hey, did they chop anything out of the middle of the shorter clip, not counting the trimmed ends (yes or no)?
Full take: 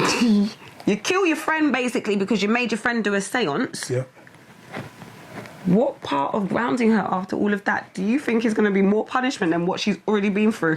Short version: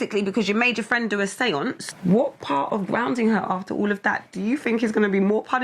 yes